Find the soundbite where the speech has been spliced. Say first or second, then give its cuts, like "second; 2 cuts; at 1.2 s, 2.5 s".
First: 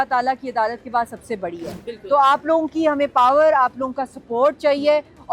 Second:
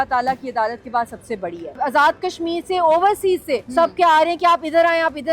second; 2 cuts; at 1.8 s, 3.6 s